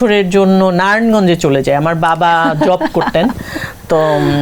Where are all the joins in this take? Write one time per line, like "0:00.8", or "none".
none